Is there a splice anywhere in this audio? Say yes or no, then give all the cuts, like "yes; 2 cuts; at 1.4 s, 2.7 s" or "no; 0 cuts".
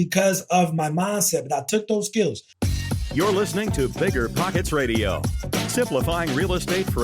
yes; 1 cut; at 2.5 s